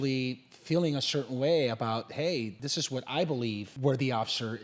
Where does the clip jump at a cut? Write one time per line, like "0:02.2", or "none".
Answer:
0:02.5
0:03.7